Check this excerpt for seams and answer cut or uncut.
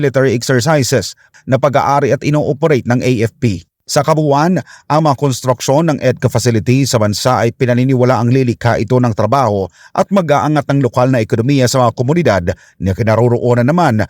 cut